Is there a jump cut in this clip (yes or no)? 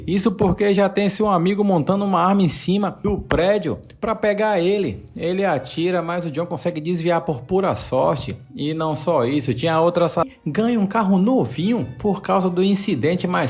yes